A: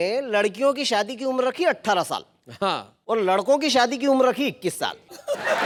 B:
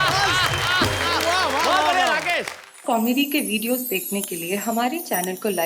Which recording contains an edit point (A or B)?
B